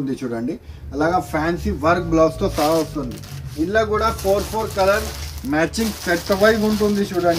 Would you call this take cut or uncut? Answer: uncut